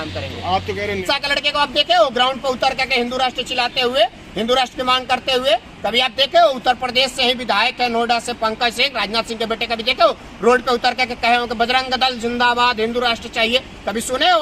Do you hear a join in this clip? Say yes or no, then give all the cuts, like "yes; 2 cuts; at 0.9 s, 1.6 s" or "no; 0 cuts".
yes; 1 cut; at 1.0 s